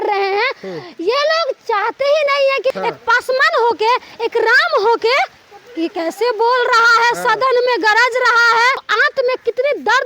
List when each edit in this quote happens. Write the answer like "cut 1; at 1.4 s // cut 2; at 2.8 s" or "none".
cut 1; at 2.8 s // cut 2; at 8.9 s